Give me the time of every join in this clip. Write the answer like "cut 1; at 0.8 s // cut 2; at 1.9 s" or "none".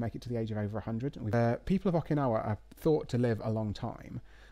cut 1; at 1.3 s